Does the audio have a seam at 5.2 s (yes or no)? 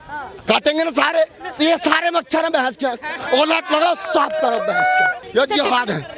yes